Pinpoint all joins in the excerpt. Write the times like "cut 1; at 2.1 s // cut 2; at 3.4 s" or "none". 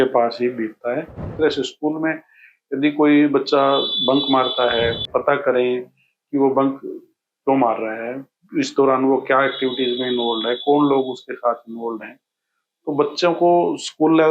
cut 1; at 1.2 s // cut 2; at 5.0 s